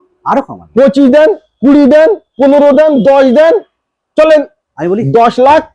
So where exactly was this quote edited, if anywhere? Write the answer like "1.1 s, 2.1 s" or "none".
none